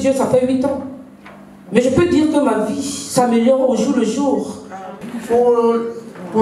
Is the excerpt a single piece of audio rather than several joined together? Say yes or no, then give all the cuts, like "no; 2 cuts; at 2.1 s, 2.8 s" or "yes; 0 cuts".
no; 1 cut; at 4.8 s